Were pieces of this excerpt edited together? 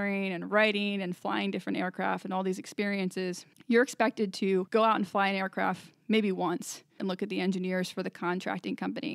yes; 3 cuts; at 3.5 s, 4.7 s, 7.0 s

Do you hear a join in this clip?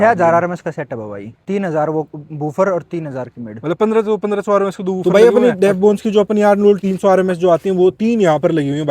yes; 3 cuts; at 1.3 s, 5.0 s, 6.8 s

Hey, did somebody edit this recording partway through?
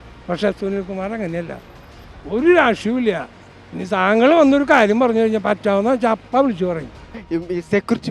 yes; 1 cut; at 7.2 s

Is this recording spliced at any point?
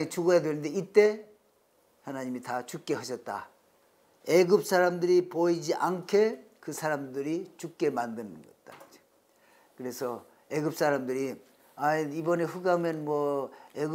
no; 0 cuts

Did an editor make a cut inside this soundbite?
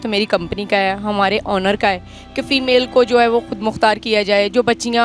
no; 0 cuts

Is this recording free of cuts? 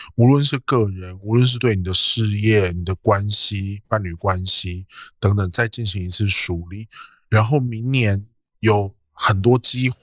yes; 0 cuts

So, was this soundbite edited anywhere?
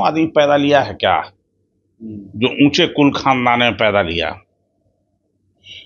no; 0 cuts

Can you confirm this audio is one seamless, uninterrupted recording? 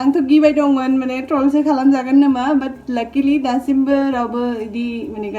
yes; 0 cuts

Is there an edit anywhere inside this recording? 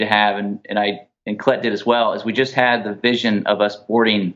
no; 0 cuts

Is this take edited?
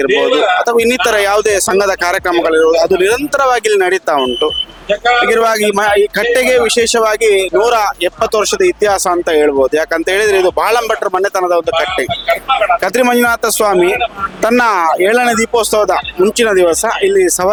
no; 0 cuts

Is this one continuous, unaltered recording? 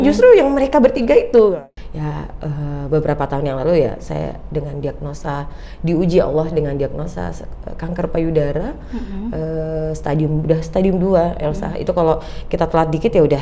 no; 1 cut; at 1.6 s

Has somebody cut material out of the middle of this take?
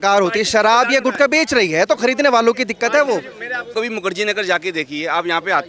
yes; 1 cut; at 3.7 s

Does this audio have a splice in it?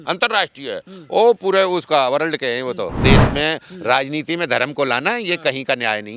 yes; 1 cut; at 3.0 s

